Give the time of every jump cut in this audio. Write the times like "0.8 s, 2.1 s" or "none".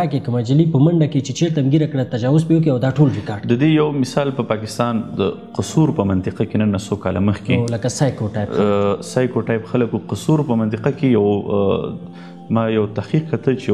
none